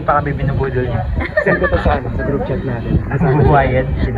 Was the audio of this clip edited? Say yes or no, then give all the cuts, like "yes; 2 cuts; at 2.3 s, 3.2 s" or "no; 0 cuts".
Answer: no; 0 cuts